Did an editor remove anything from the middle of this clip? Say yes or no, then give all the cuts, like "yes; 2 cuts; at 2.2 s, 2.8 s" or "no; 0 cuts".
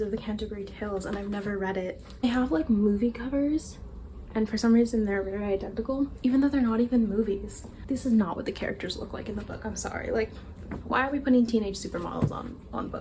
yes; 2 cuts; at 2.2 s, 7.8 s